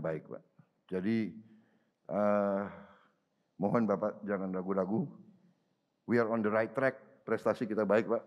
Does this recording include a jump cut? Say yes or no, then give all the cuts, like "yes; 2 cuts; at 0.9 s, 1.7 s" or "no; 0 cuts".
yes; 1 cut; at 7.1 s